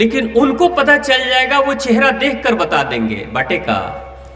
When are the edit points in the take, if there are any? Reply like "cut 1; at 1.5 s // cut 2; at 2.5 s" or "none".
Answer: none